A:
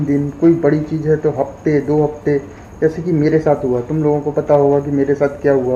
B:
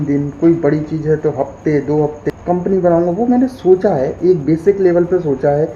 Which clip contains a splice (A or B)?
B